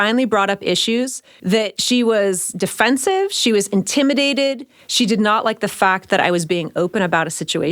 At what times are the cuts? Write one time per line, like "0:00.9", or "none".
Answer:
0:01.5